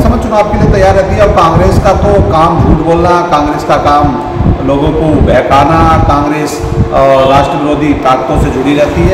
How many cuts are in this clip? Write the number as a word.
zero